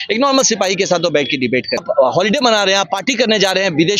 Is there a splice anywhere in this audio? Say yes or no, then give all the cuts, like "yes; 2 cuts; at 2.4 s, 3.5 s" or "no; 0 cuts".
yes; 1 cut; at 1.8 s